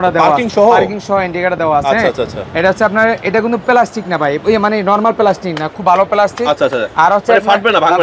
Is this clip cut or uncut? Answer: uncut